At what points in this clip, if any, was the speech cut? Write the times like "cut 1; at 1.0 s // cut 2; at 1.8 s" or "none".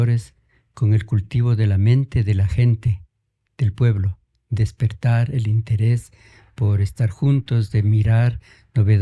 none